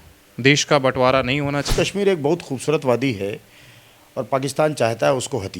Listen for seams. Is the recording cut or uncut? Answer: cut